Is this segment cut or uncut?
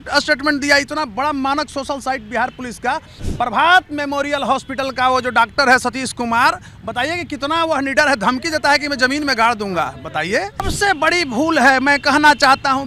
cut